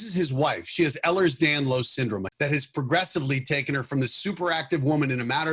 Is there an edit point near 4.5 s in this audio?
no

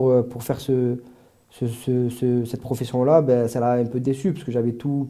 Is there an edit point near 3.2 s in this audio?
no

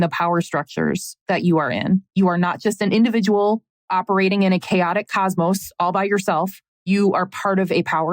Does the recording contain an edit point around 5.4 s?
no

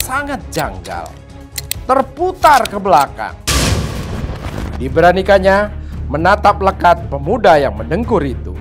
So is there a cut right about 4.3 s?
yes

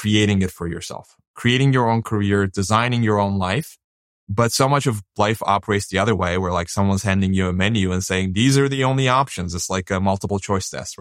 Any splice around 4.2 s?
yes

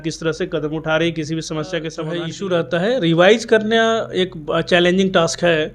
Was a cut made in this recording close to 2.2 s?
yes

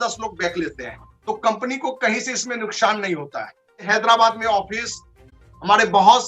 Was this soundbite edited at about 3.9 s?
yes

